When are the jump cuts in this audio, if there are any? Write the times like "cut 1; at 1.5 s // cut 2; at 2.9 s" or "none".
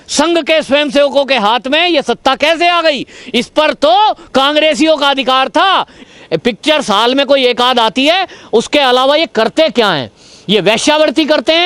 cut 1; at 6.0 s